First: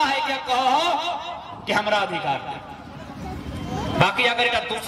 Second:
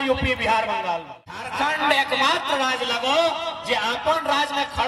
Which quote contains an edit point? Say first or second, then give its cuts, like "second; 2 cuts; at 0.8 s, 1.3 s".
second; 1 cut; at 1.5 s